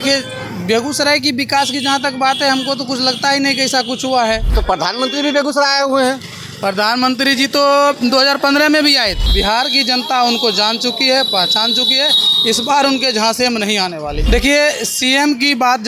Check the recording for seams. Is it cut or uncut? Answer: cut